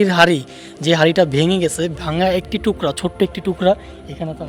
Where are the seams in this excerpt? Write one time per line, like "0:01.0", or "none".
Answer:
none

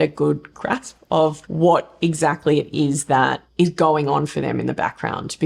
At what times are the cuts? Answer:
0:01.4

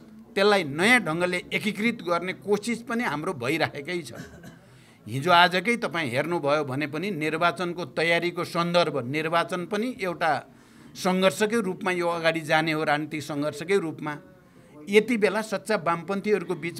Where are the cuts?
none

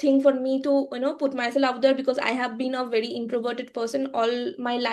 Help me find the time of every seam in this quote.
none

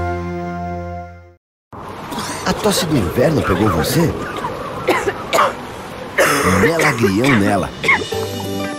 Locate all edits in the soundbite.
0:01.5

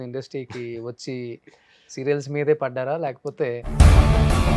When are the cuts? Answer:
0:03.7

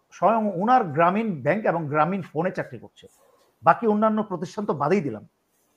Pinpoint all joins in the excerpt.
none

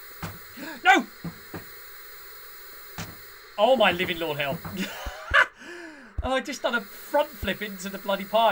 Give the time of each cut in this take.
none

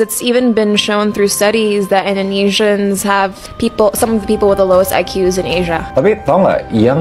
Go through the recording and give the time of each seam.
0:05.8

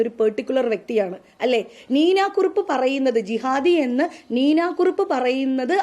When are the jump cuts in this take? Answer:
none

